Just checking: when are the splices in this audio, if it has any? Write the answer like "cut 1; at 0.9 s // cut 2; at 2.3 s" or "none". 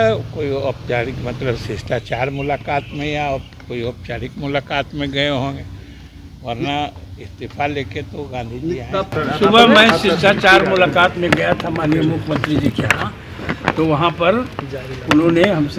cut 1; at 9.1 s